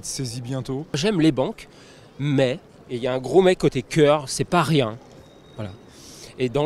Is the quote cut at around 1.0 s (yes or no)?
yes